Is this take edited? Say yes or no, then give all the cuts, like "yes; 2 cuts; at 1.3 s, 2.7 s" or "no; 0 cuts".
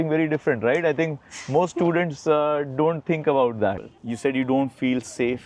yes; 1 cut; at 3.9 s